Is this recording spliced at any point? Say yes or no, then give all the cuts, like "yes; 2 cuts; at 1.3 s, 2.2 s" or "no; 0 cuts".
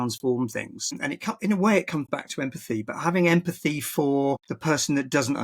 yes; 2 cuts; at 1.0 s, 4.5 s